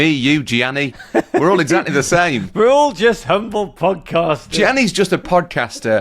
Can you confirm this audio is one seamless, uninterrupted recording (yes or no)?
no